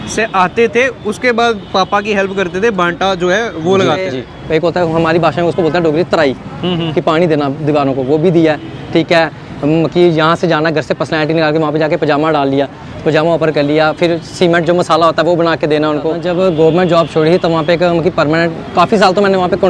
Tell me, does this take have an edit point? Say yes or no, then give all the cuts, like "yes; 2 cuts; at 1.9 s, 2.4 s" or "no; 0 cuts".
yes; 2 cuts; at 4.1 s, 16.2 s